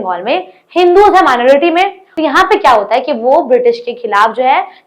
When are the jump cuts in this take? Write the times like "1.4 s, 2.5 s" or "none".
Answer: 2.0 s